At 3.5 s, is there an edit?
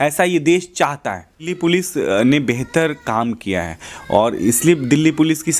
no; 1 cut; at 1.5 s

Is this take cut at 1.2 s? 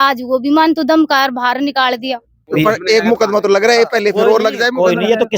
no; 1 cut; at 2.4 s

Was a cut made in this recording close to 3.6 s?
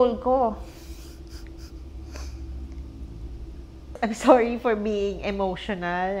yes; 1 cut; at 3.6 s

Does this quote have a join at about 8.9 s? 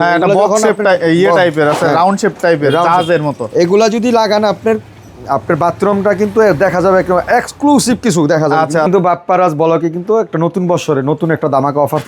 yes; 1 cut; at 8.9 s

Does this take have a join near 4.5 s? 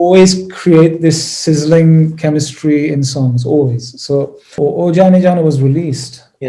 yes; 1 cut; at 4.5 s

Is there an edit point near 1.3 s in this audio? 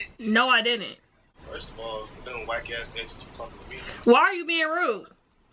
yes; 2 cuts; at 1.3 s, 4.1 s

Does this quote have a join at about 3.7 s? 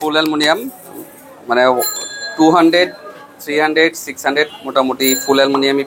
no; 0 cuts

